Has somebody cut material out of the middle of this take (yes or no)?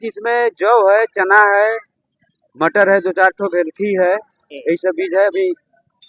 no